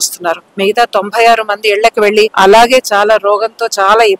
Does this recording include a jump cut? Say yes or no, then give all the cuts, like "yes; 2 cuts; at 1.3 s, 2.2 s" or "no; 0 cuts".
yes; 1 cut; at 2.3 s